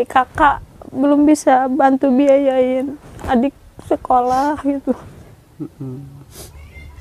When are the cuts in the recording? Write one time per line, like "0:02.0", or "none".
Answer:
0:05.1